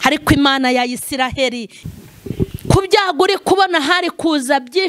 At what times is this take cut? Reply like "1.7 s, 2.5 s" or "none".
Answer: 1.8 s